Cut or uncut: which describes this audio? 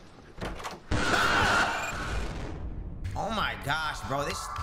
uncut